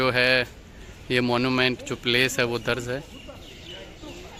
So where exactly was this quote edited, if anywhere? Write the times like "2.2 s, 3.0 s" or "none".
none